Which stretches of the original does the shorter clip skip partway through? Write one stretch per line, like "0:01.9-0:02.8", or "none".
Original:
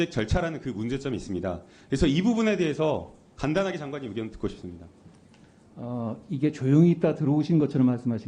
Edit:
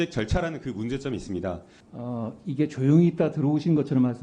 0:01.7-0:05.6